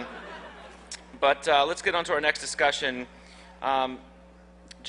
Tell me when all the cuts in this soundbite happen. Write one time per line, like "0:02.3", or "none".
0:03.5